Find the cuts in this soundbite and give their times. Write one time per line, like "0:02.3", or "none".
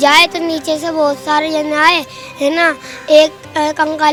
none